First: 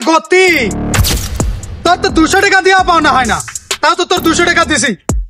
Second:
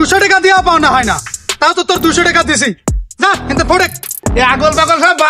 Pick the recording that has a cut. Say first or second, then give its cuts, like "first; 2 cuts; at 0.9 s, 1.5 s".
second; 1 cut; at 4.3 s